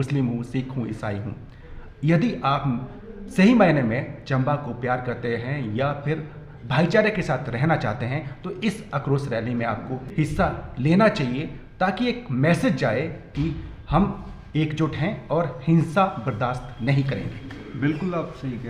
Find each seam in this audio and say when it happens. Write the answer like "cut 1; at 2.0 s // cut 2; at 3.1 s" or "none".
cut 1; at 10.0 s